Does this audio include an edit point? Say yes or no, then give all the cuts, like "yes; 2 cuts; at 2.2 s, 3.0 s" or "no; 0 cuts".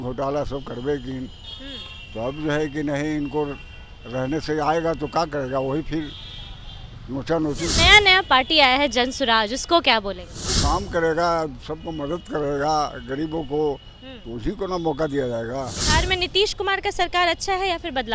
yes; 3 cuts; at 7.7 s, 10.6 s, 15.9 s